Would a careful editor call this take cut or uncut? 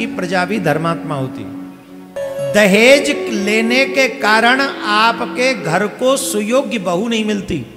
cut